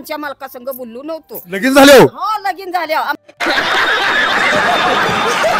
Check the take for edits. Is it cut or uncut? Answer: cut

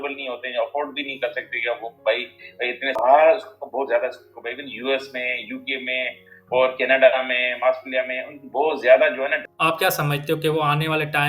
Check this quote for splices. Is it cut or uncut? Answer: cut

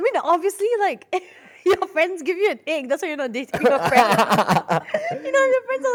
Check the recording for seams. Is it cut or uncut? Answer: uncut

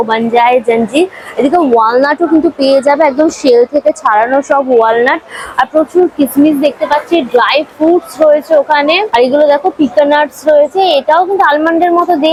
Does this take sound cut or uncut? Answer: uncut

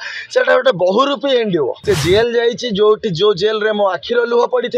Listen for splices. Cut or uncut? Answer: cut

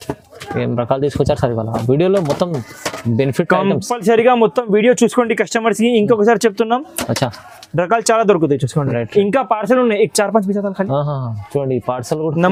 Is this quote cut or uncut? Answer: uncut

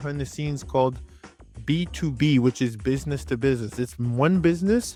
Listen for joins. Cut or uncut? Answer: uncut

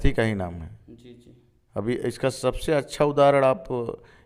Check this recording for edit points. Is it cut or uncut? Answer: uncut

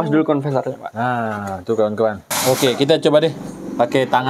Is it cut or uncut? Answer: cut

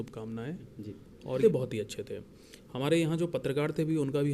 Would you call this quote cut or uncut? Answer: cut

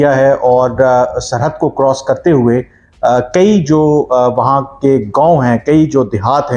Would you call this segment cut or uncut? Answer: uncut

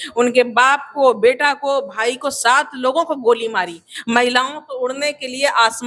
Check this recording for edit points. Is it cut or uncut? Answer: cut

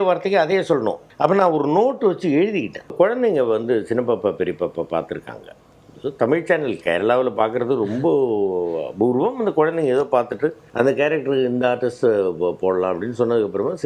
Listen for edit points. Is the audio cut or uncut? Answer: cut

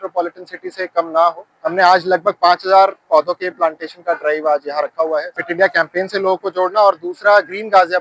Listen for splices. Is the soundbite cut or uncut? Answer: cut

